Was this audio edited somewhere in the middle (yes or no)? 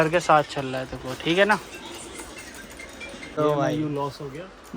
yes